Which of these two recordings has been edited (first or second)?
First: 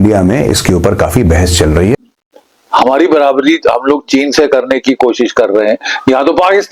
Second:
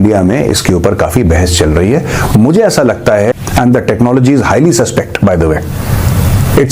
first